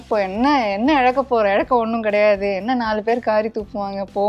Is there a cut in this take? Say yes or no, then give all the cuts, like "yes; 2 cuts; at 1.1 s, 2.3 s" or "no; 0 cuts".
no; 0 cuts